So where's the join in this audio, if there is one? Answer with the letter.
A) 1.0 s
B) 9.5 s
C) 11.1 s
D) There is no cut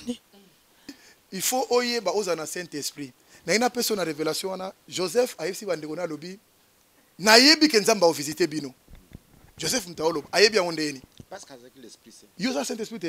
A